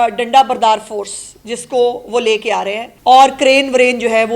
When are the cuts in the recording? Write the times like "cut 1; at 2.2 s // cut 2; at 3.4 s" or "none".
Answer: cut 1; at 2.8 s